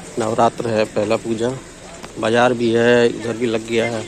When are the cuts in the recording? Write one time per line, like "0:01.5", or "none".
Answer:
none